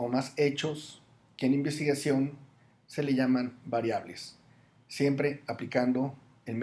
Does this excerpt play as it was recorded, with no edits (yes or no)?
no